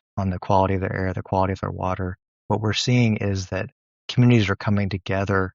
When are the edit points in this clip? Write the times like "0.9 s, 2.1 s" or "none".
2.3 s